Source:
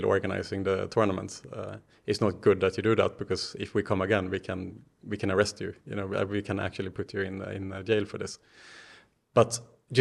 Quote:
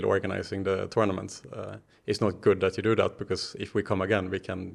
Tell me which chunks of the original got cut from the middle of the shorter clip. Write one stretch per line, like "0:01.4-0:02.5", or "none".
none